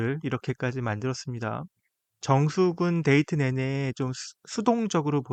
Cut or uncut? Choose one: uncut